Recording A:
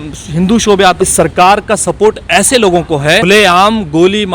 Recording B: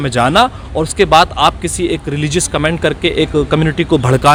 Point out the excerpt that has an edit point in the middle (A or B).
A